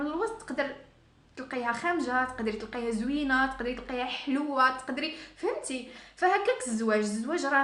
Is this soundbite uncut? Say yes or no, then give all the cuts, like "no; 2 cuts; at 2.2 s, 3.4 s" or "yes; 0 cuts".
yes; 0 cuts